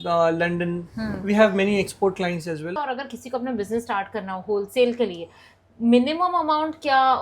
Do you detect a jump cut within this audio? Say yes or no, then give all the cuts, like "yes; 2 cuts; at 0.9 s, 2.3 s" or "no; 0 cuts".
yes; 1 cut; at 2.8 s